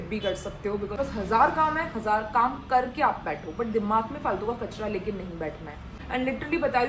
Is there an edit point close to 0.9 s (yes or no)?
yes